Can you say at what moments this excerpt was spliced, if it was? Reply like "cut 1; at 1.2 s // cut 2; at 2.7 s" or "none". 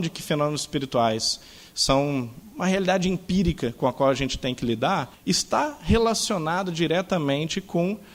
cut 1; at 2.4 s // cut 2; at 5.1 s